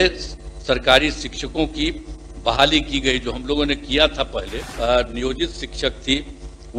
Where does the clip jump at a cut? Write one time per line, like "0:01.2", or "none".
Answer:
0:04.6